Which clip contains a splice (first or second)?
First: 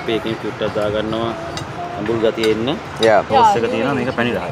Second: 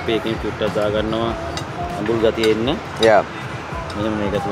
first